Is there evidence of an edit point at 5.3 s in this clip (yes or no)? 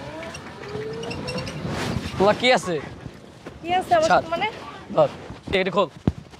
yes